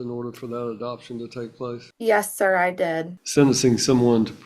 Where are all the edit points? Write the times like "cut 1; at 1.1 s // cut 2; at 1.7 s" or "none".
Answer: cut 1; at 1.9 s // cut 2; at 3.1 s

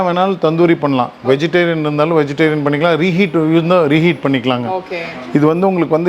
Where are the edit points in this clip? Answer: none

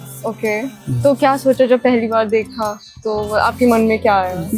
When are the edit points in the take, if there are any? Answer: none

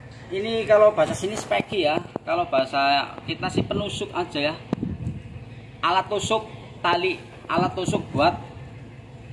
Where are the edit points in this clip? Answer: none

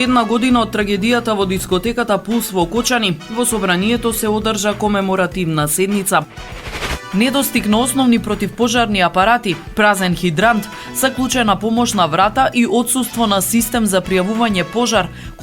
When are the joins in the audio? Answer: cut 1; at 6.5 s

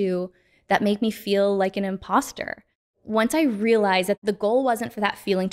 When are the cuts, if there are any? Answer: cut 1; at 3.0 s // cut 2; at 4.2 s

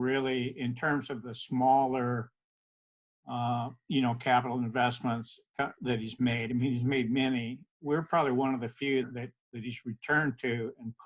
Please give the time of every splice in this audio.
cut 1; at 9.1 s

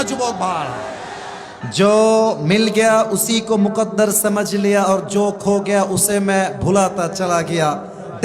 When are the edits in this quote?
cut 1; at 1.6 s

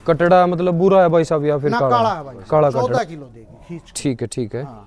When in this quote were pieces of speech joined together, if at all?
cut 1; at 2.9 s

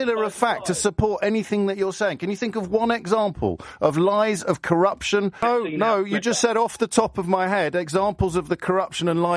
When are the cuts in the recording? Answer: cut 1; at 5.4 s

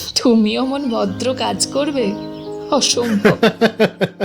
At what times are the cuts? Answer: cut 1; at 3.2 s

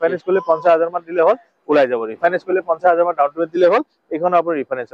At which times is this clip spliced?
cut 1; at 2.2 s

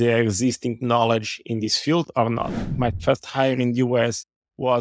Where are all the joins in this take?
cut 1; at 2.7 s

